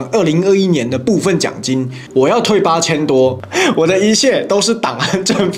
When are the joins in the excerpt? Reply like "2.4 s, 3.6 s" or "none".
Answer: 2.0 s, 3.4 s